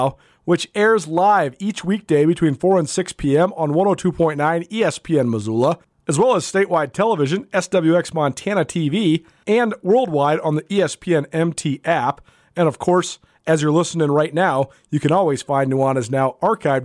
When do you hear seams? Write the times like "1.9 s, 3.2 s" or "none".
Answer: 5.9 s, 9.3 s